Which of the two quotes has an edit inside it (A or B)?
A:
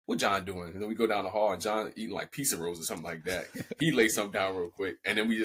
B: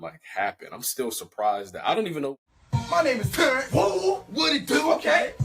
B